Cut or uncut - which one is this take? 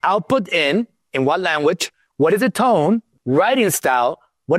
cut